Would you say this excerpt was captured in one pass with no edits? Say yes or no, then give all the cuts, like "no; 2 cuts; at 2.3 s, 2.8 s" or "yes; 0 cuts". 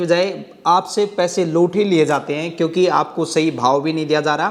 yes; 0 cuts